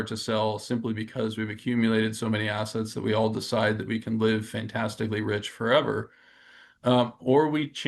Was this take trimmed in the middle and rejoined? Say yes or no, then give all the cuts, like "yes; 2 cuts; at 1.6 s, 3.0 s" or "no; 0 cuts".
no; 0 cuts